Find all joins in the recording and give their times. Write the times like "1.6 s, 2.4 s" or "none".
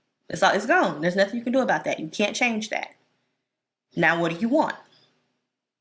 none